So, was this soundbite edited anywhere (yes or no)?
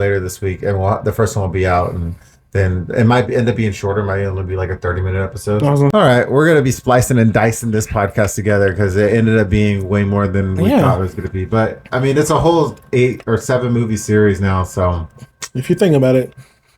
yes